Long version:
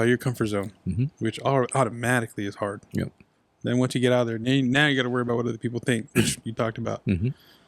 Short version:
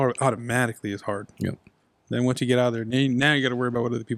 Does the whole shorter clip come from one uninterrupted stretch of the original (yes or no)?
yes